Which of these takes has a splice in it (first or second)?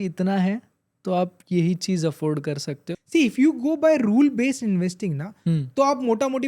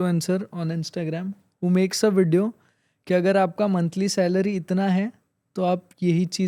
first